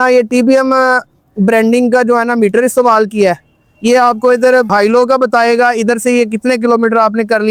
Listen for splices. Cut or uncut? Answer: uncut